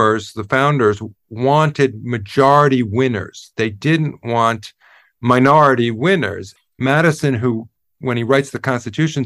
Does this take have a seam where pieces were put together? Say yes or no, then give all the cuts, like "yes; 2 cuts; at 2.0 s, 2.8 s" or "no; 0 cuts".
yes; 1 cut; at 6.5 s